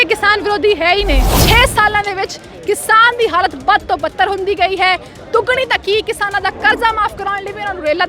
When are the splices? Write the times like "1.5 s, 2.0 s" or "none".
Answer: 1.3 s

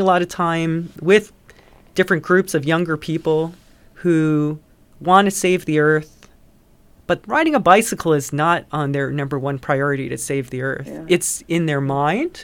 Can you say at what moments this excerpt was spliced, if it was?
0.9 s

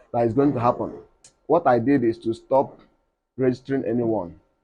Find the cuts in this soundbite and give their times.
1.3 s

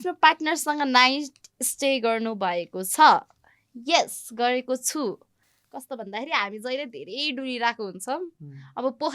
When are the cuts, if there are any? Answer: none

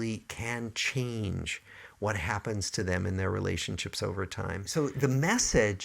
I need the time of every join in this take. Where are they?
4.7 s

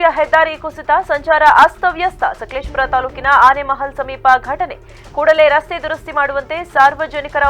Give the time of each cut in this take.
none

